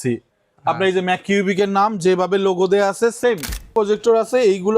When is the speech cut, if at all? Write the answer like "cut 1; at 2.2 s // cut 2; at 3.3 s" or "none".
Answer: cut 1; at 3.7 s

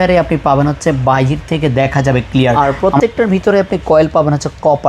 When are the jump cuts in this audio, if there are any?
cut 1; at 2.5 s

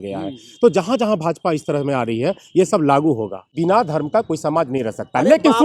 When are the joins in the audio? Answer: cut 1; at 3.5 s

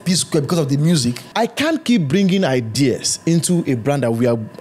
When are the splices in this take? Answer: cut 1; at 1.2 s

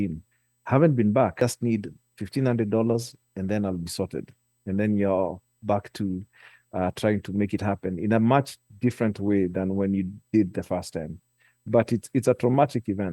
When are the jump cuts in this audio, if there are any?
cut 1; at 1.4 s

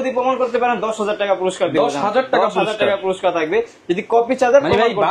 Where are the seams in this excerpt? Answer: none

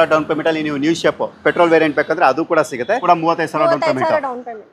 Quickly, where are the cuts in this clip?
cut 1; at 3.0 s

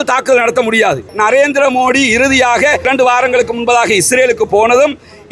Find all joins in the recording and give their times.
cut 1; at 1.1 s // cut 2; at 2.9 s

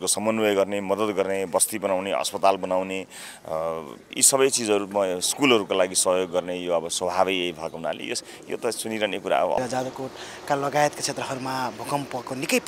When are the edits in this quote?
cut 1; at 9.6 s

